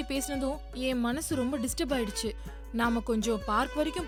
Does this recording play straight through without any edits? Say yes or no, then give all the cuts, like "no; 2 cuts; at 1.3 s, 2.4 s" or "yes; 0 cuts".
yes; 0 cuts